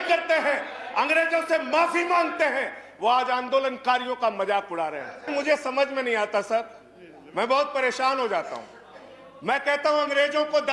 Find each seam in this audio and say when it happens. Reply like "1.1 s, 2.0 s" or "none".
5.3 s